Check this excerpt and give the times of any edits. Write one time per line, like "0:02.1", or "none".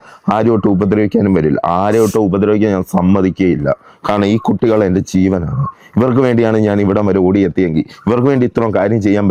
none